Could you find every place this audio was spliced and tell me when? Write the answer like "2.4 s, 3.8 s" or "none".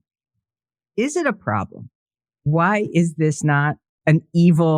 2.5 s, 3.9 s